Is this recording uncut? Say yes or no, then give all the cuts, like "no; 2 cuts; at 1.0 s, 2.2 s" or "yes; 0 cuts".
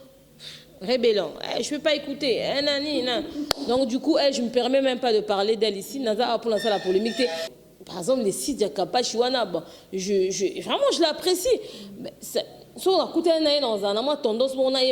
no; 1 cut; at 7.5 s